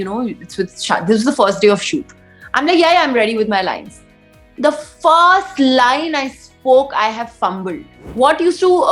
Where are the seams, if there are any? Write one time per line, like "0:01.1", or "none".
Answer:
0:08.0